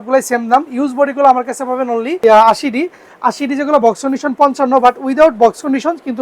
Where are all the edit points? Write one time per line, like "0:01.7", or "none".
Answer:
0:02.2